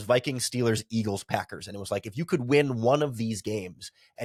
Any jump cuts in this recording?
no; 0 cuts

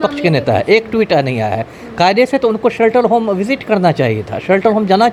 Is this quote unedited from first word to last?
yes; 0 cuts

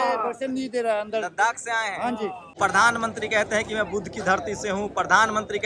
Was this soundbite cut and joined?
yes; 1 cut; at 2.6 s

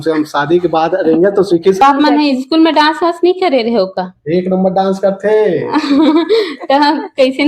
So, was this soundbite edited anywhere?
yes; 1 cut; at 1.8 s

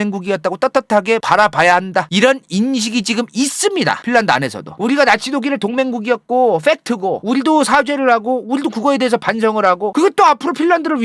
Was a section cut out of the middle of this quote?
yes; 1 cut; at 4.6 s

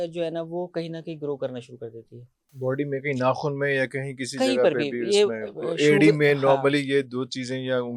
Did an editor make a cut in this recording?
no; 0 cuts

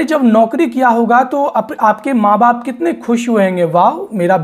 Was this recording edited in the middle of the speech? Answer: no; 0 cuts

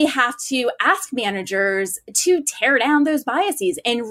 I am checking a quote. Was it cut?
no; 0 cuts

